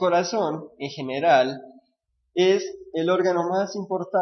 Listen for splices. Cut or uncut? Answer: cut